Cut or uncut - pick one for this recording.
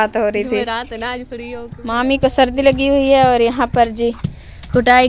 cut